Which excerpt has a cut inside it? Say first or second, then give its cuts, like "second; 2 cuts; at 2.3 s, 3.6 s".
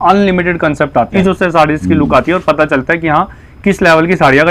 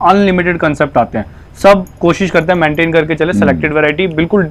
first; 1 cut; at 1.1 s